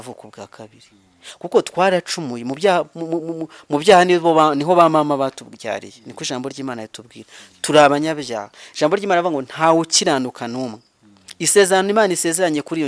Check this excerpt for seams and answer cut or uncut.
uncut